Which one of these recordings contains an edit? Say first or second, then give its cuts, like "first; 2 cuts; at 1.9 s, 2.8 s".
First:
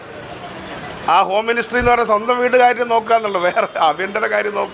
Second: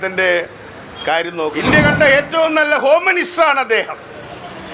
second; 1 cut; at 1.5 s